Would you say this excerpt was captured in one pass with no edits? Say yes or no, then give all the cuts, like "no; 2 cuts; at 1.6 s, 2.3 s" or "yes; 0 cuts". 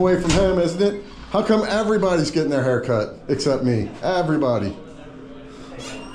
yes; 0 cuts